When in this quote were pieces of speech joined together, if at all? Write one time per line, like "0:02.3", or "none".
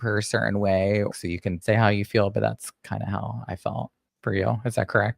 0:01.1
0:04.0